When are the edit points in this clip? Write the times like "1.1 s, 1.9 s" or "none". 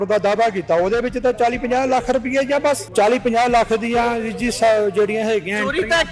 2.9 s

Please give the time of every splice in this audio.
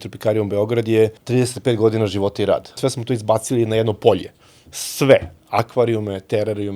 1.2 s, 2.8 s

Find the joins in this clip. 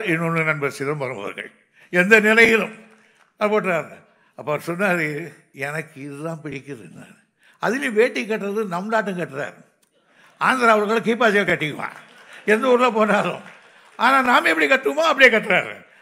5.4 s

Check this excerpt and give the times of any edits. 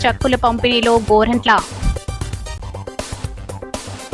1.9 s

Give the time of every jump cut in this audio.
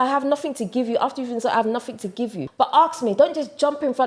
2.4 s

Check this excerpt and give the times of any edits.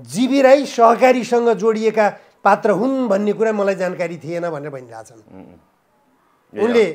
none

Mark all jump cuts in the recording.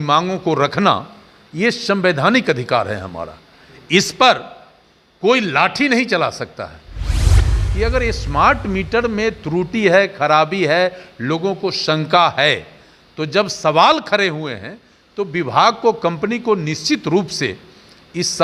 7.3 s

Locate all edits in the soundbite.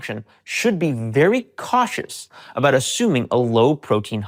none

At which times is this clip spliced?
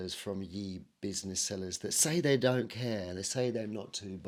none

